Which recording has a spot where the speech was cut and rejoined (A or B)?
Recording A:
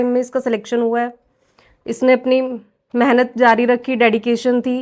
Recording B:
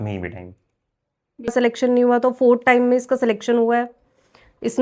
B